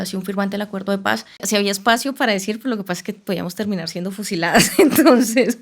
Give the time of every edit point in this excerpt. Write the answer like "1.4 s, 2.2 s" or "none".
1.4 s